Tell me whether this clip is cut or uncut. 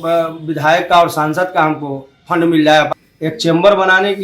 cut